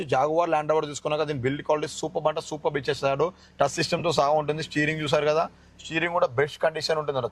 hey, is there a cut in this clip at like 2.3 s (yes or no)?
no